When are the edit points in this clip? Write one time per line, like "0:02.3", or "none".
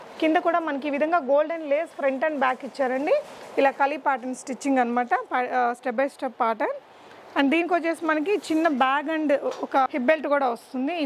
none